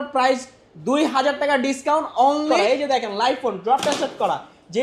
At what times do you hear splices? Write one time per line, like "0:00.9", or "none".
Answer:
0:02.5